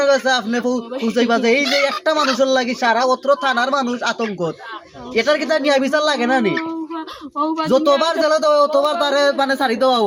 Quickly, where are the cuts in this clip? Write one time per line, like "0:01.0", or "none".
none

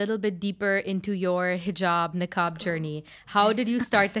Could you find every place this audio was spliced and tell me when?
none

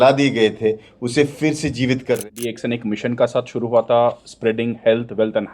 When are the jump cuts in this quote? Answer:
0:02.2

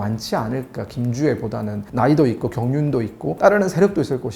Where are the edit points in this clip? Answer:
none

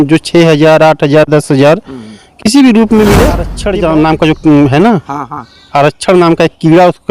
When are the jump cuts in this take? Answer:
0:03.5

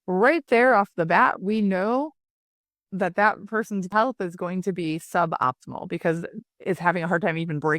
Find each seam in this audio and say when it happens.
0:03.9

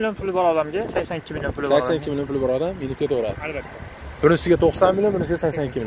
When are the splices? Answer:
none

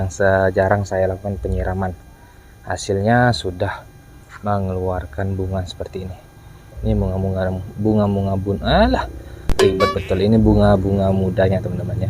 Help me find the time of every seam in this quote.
none

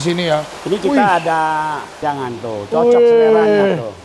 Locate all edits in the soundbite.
0:01.9

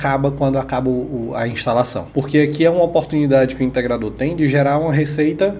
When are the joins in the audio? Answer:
0:02.0

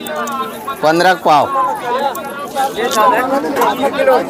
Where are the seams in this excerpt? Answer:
none

